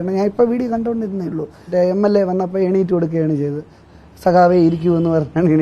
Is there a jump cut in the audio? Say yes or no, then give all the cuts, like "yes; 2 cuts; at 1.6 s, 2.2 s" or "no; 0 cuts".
yes; 1 cut; at 1.7 s